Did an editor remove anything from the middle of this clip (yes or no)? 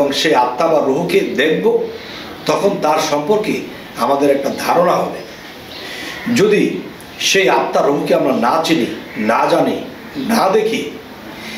no